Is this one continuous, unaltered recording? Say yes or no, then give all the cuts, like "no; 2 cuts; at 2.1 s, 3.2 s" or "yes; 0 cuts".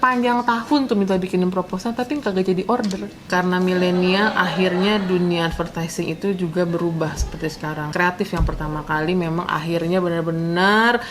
no; 2 cuts; at 3.1 s, 7.9 s